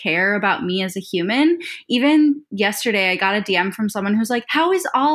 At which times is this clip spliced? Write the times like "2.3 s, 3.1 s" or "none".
none

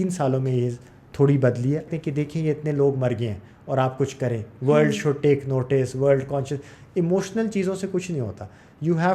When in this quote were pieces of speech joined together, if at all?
1.8 s

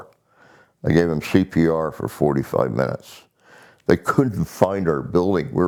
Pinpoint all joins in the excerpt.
none

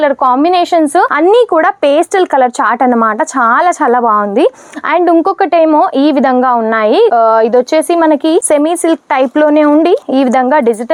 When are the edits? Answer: none

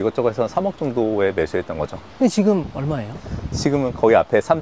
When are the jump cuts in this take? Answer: 2.0 s

